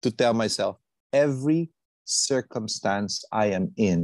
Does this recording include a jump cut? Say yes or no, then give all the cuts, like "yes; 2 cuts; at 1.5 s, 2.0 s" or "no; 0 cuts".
no; 0 cuts